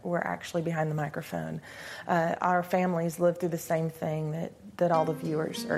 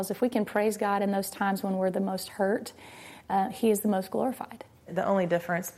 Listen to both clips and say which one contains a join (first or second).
second